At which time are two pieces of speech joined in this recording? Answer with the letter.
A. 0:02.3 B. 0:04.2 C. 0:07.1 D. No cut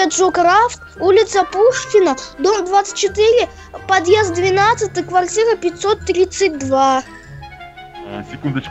D